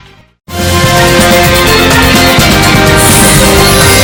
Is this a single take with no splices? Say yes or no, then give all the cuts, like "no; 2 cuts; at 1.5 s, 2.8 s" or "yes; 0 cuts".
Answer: yes; 0 cuts